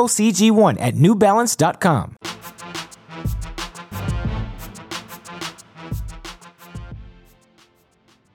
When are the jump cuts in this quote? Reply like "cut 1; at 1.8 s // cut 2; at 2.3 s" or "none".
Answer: none